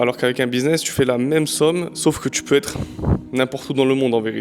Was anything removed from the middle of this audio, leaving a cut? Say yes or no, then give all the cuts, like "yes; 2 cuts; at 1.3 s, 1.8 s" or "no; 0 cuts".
no; 0 cuts